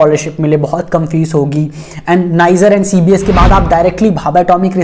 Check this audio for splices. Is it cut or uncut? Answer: uncut